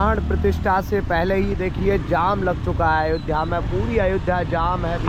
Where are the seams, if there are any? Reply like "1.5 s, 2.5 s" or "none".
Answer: none